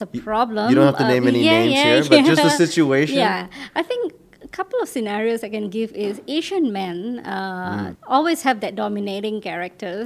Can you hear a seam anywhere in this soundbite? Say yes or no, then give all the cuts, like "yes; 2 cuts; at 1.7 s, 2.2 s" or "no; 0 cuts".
no; 0 cuts